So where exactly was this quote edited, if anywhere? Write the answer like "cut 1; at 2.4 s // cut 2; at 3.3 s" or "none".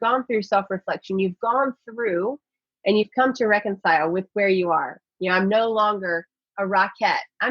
none